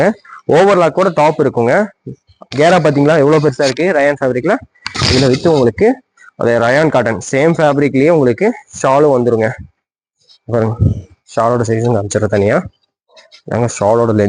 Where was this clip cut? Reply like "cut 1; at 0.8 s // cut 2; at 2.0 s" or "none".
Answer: none